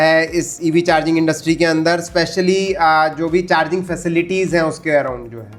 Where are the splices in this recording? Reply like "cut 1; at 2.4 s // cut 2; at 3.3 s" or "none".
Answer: none